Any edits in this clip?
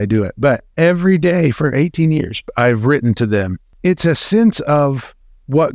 yes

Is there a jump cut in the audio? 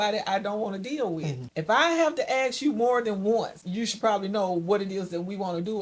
yes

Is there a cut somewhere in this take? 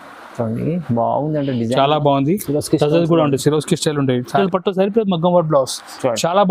yes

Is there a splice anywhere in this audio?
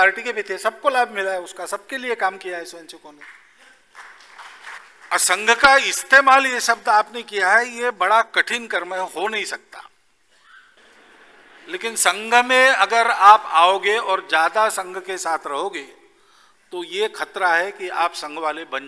yes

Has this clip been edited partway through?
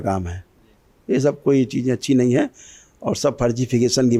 no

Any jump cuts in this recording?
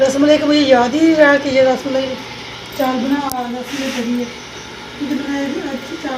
no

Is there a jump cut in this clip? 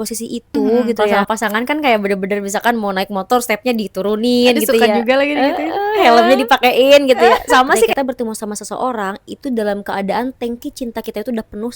yes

